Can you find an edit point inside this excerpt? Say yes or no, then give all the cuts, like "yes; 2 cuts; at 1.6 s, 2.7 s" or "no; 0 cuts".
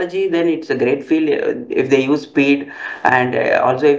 no; 0 cuts